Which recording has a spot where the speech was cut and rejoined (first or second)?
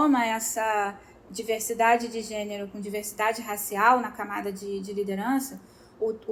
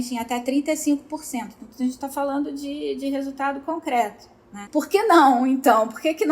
second